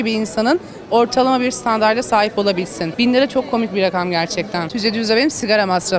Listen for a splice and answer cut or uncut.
cut